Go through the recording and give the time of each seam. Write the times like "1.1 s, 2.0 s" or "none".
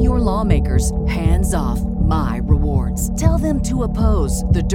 none